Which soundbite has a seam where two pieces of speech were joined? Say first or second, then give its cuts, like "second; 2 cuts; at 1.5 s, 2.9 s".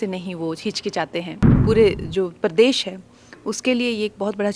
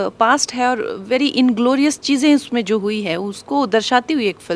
first; 1 cut; at 1.4 s